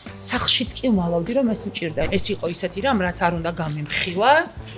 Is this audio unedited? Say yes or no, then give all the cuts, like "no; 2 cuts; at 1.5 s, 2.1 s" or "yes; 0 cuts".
no; 1 cut; at 2.1 s